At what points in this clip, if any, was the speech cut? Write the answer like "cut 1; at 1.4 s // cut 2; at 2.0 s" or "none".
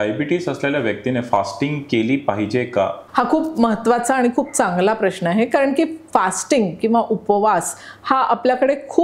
cut 1; at 3.0 s